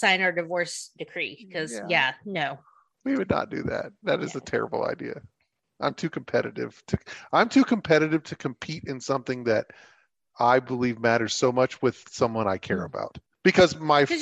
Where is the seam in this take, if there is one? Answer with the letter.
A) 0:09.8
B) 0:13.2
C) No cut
B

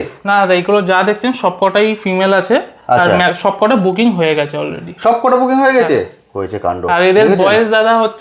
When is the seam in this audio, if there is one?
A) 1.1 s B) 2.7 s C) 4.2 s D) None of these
D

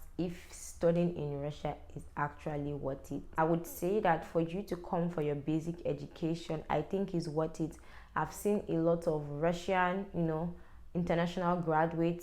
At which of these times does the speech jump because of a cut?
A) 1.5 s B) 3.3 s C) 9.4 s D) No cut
B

